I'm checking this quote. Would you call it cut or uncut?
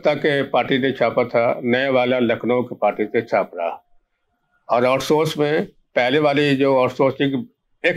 uncut